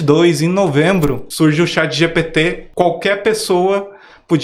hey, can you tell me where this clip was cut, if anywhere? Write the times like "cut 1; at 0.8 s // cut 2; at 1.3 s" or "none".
cut 1; at 1.3 s // cut 2; at 2.6 s